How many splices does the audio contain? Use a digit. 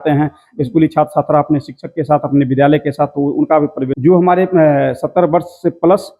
1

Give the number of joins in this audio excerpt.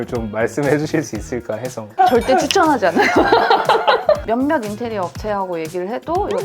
1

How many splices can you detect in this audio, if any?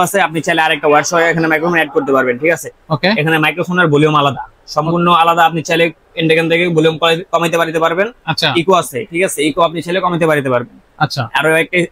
0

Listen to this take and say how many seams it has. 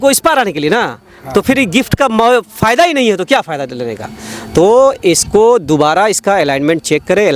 0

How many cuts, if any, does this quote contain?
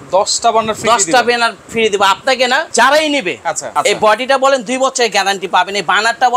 2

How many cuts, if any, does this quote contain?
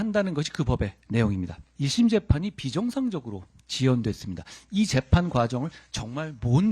2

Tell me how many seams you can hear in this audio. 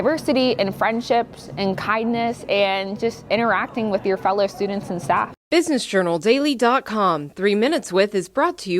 1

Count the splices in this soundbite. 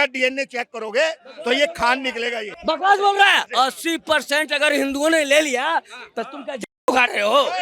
2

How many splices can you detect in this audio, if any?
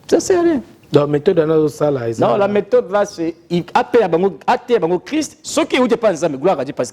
0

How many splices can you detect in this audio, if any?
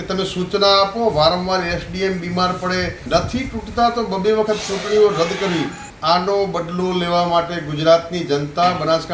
2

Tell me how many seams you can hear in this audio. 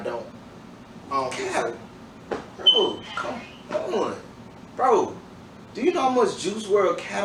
0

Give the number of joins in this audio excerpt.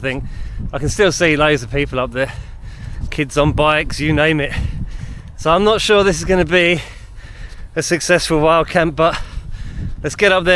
0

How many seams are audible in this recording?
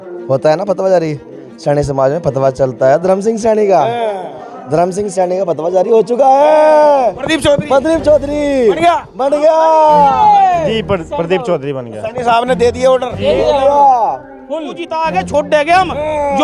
1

